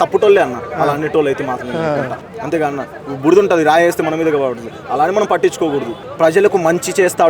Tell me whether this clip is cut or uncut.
cut